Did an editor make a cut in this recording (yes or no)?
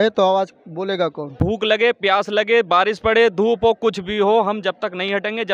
yes